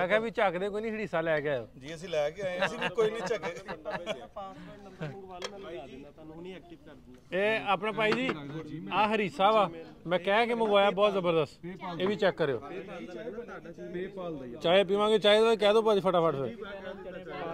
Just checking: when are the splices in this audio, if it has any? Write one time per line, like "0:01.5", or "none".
none